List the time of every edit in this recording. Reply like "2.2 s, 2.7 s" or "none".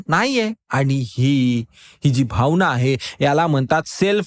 none